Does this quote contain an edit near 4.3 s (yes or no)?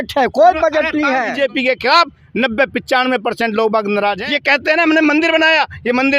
yes